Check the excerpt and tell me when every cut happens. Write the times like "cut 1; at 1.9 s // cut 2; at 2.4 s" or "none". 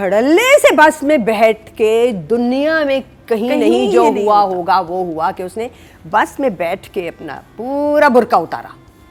none